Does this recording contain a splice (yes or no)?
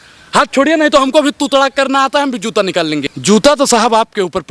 yes